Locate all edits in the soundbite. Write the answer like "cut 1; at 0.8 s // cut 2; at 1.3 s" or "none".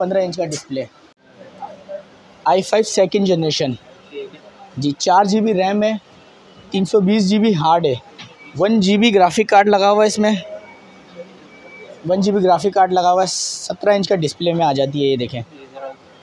none